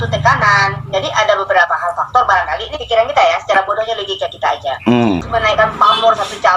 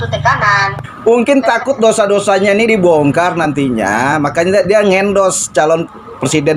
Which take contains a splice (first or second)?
second